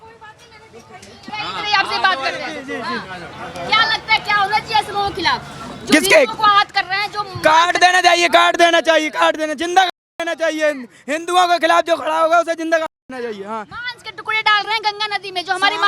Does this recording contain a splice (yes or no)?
yes